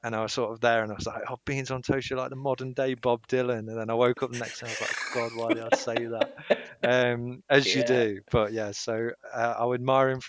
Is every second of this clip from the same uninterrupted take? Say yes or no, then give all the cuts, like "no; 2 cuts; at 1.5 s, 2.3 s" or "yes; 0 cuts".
yes; 0 cuts